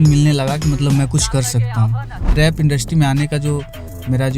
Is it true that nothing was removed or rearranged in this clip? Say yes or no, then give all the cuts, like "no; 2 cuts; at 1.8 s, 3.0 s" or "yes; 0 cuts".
no; 1 cut; at 2.3 s